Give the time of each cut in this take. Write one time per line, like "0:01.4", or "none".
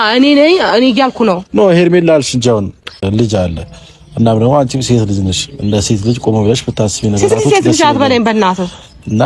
0:02.9